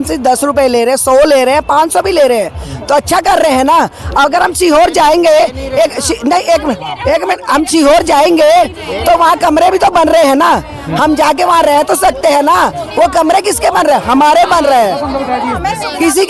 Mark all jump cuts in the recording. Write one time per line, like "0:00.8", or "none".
none